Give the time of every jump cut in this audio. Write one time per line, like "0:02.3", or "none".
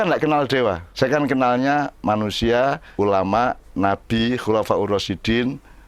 0:00.8
0:02.8